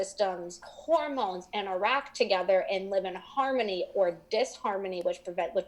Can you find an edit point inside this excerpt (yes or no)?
no